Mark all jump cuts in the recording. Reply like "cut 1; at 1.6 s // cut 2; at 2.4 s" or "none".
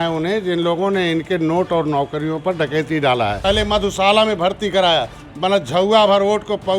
cut 1; at 3.4 s